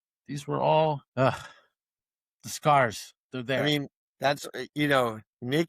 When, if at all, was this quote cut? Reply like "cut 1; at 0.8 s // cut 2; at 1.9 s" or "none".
cut 1; at 1.1 s // cut 2; at 4.0 s